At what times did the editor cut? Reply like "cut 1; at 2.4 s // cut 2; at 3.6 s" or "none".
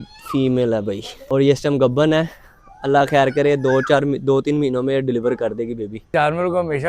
cut 1; at 1.1 s // cut 2; at 6.1 s